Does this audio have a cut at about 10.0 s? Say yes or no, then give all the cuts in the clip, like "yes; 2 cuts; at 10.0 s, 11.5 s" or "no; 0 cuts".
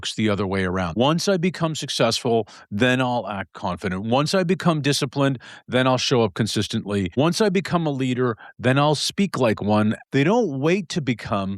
yes; 3 cuts; at 0.9 s, 7.1 s, 10.0 s